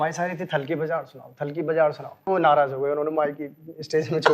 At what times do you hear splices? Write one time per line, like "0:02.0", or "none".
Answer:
0:02.2